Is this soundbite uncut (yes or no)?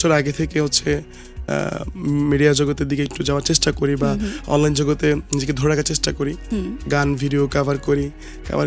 yes